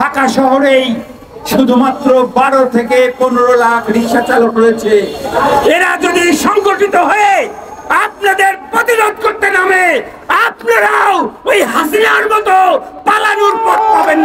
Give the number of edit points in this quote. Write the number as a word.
zero